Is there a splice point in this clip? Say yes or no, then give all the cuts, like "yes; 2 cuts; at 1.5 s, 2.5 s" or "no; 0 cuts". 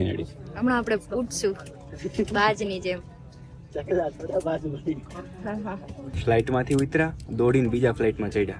yes; 1 cut; at 6.0 s